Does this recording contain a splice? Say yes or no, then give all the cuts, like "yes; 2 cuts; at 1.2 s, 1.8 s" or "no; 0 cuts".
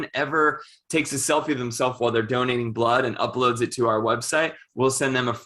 no; 0 cuts